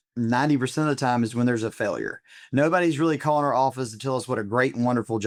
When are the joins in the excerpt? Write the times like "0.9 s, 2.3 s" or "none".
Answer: none